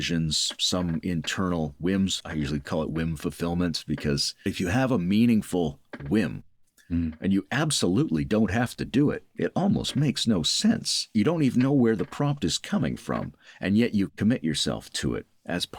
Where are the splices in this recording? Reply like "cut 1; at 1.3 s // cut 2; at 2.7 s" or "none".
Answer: cut 1; at 2.2 s // cut 2; at 4.5 s // cut 3; at 11.1 s